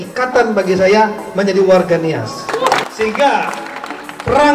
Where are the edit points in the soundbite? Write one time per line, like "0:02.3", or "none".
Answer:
0:02.8